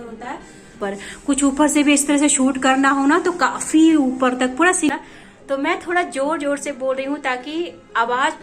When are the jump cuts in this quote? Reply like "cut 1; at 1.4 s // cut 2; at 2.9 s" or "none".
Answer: cut 1; at 0.8 s // cut 2; at 4.9 s